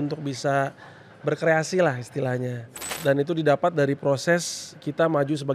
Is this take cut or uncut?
cut